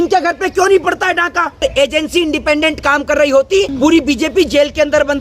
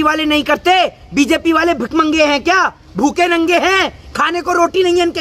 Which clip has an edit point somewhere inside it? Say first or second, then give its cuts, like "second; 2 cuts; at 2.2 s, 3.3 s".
first; 2 cuts; at 1.6 s, 3.7 s